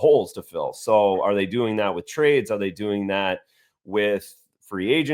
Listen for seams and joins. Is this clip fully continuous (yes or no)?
yes